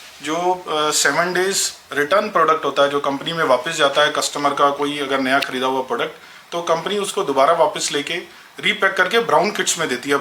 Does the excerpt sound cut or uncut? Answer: uncut